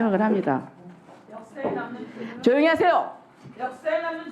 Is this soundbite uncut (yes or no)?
yes